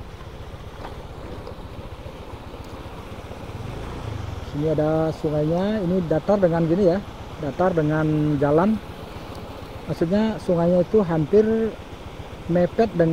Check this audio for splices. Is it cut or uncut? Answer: uncut